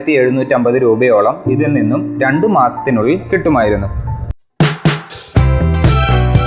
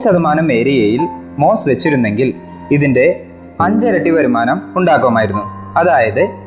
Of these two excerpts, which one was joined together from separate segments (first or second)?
first